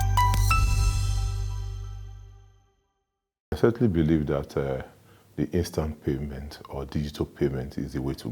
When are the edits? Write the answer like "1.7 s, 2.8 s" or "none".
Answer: 3.5 s